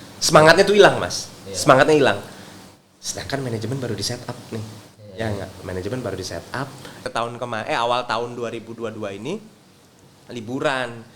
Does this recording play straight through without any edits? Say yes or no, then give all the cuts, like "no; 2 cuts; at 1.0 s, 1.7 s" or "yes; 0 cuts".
no; 1 cut; at 7.1 s